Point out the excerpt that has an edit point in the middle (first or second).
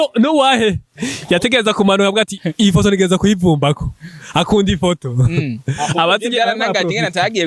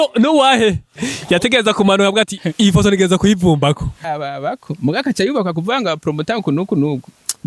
second